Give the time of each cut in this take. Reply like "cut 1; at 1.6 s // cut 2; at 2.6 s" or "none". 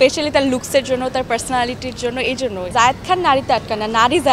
cut 1; at 2.7 s